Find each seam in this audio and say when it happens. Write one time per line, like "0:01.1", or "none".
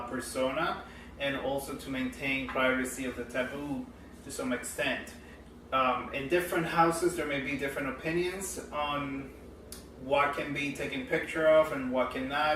0:04.7